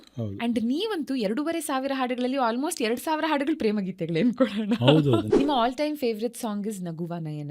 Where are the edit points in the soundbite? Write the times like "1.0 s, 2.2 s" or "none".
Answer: 5.3 s